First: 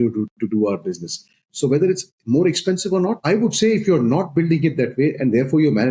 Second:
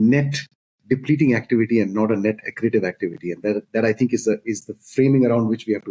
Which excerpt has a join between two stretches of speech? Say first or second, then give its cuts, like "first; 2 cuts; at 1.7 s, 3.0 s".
first; 2 cuts; at 1.5 s, 3.2 s